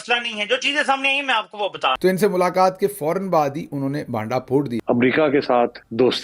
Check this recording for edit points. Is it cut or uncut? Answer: cut